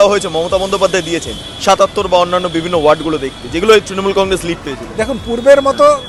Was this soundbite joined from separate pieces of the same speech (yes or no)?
no